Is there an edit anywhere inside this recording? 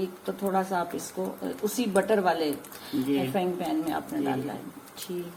no; 0 cuts

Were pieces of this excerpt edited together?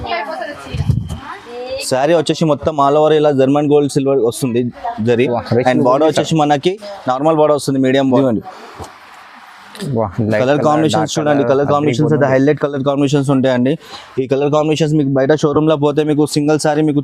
yes; 1 cut; at 8.2 s

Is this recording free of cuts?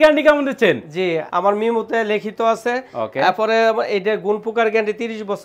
no; 1 cut; at 1.3 s

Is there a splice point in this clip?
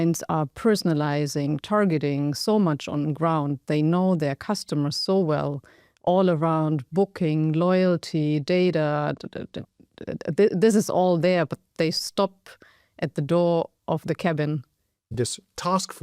yes; 1 cut; at 15.1 s

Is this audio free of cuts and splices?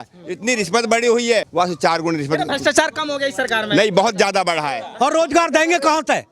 no; 2 cuts; at 1.5 s, 4.8 s

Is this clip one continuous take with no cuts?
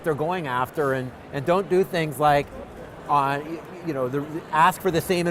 yes; 0 cuts

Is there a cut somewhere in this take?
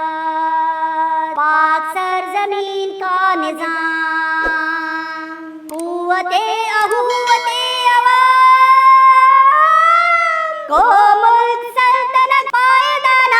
no; 0 cuts

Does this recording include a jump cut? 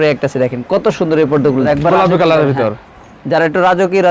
yes; 1 cut; at 1.6 s

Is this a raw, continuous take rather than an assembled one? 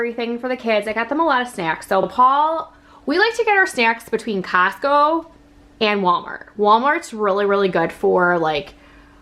yes; 0 cuts

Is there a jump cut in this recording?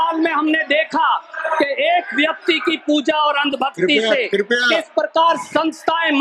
no; 0 cuts

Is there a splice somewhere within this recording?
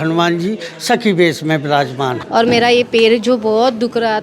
yes; 1 cut; at 2.2 s

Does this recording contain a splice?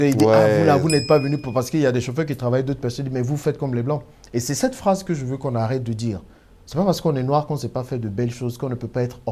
no; 0 cuts

